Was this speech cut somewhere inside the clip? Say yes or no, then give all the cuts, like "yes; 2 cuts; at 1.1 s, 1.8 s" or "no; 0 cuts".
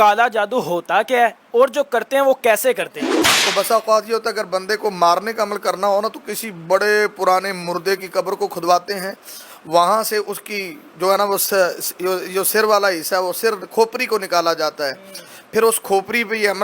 yes; 1 cut; at 3.3 s